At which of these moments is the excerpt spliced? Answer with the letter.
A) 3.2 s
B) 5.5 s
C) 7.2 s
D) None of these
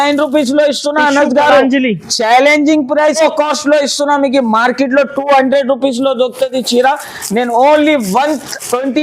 A